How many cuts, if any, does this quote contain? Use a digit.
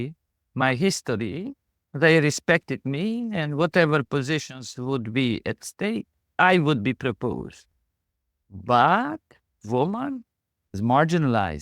1